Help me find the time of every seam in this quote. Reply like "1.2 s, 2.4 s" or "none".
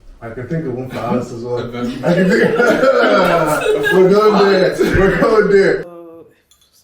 5.8 s